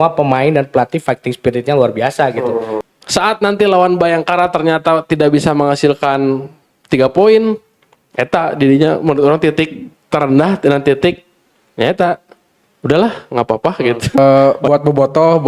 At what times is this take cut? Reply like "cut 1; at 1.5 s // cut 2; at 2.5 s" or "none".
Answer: cut 1; at 2.8 s // cut 2; at 14.4 s